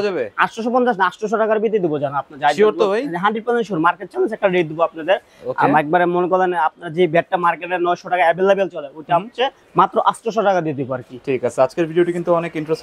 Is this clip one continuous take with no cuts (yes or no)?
yes